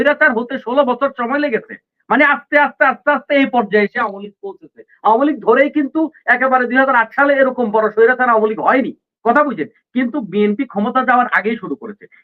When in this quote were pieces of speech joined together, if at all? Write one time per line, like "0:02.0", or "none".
none